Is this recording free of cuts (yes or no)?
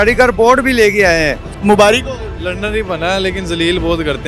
no